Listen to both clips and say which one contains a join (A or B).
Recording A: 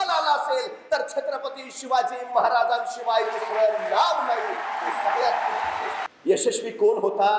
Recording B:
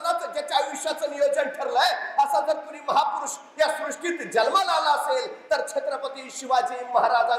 A